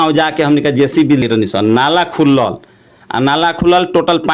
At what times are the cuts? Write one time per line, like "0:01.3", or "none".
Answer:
0:01.2